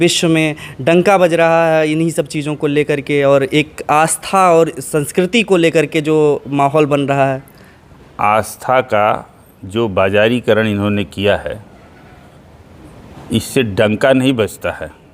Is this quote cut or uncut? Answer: uncut